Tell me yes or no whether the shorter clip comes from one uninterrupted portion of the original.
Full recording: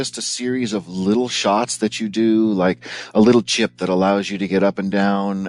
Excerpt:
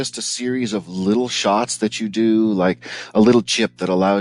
yes